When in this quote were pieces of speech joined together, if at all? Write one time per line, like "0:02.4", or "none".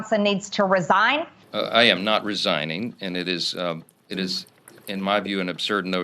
0:01.4